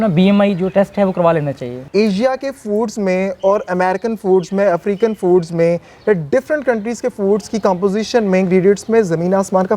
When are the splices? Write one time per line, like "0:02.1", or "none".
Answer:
0:01.7

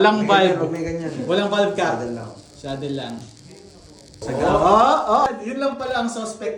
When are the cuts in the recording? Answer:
0:04.1
0:05.2

